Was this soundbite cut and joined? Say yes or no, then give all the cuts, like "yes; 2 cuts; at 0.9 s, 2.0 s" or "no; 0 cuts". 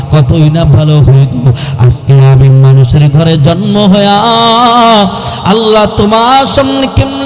no; 0 cuts